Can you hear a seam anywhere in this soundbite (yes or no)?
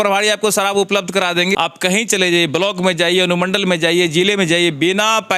yes